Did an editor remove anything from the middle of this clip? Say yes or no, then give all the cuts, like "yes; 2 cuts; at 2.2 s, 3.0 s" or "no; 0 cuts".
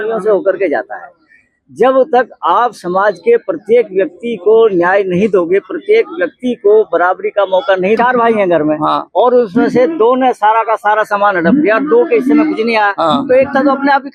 yes; 1 cut; at 8.0 s